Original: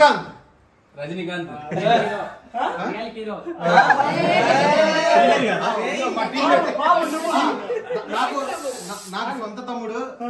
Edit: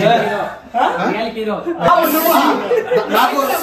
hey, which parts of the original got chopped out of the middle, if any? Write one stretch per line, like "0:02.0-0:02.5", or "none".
0:03.7-0:06.9